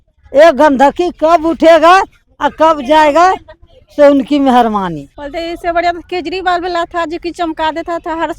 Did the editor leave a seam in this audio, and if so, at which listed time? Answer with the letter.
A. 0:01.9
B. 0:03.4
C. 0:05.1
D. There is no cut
C